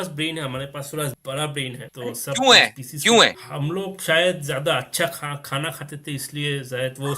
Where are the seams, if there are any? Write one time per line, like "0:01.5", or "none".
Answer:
0:01.2
0:01.9
0:03.5